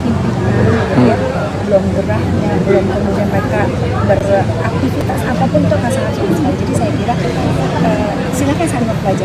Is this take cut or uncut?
uncut